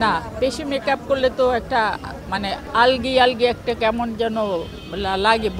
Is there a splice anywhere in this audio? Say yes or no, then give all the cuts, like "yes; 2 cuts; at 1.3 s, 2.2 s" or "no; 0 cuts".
no; 0 cuts